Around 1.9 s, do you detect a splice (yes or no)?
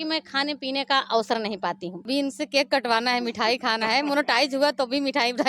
yes